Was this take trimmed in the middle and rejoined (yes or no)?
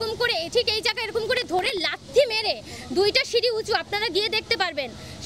no